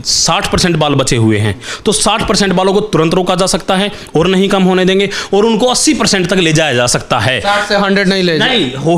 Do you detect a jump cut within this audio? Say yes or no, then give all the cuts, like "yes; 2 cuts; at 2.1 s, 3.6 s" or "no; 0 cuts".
no; 0 cuts